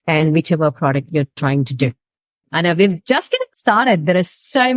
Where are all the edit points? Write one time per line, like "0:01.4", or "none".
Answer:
0:02.4